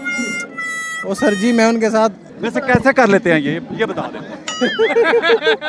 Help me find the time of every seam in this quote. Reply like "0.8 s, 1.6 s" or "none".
2.3 s